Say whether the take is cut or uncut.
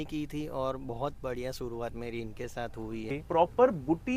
cut